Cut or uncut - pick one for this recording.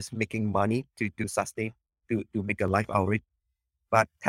cut